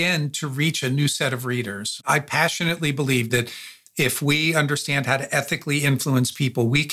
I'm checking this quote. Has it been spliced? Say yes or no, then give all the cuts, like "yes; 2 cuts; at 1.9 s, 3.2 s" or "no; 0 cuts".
yes; 2 cuts; at 2.0 s, 3.4 s